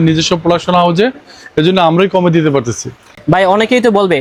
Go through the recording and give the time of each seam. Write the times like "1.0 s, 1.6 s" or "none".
none